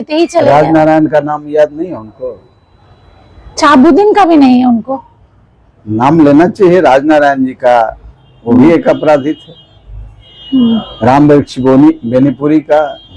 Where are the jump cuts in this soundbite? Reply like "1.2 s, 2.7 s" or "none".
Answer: none